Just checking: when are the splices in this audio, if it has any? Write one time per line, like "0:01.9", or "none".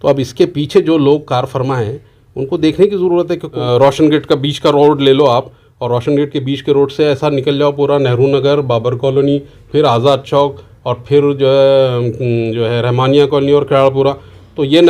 0:03.5